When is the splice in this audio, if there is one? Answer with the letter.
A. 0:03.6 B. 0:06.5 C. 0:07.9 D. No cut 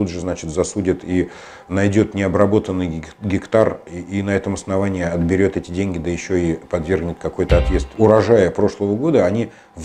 C